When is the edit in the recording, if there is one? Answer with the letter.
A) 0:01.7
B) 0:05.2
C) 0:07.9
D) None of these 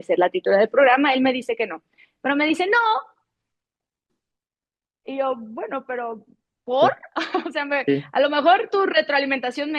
D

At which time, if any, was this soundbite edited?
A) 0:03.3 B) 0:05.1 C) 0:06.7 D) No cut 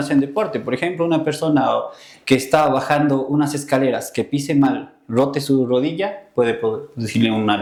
D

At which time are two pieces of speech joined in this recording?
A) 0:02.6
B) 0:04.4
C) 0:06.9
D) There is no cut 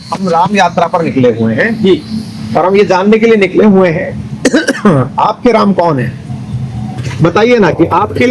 C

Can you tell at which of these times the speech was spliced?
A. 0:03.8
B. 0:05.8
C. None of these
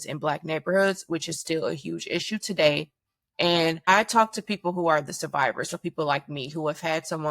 A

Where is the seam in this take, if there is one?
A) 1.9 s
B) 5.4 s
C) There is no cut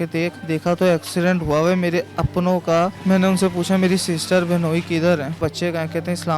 B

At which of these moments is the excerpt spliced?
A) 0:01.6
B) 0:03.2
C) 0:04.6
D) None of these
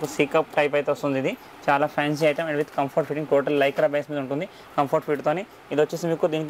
D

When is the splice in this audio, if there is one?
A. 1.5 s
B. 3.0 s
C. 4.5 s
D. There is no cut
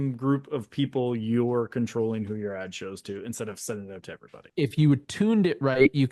C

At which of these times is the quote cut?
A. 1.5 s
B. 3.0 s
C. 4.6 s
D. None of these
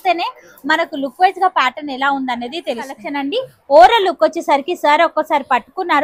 B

